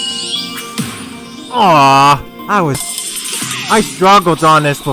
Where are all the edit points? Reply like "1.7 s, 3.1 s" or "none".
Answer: 2.8 s